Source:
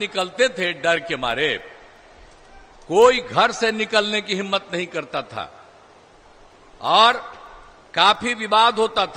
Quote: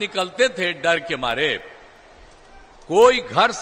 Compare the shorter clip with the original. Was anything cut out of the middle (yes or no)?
no